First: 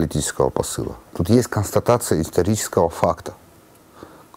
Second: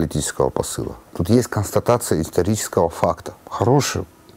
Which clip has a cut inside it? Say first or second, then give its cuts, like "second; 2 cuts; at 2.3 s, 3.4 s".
second; 1 cut; at 3.4 s